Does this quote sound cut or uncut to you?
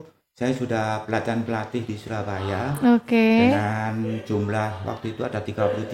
uncut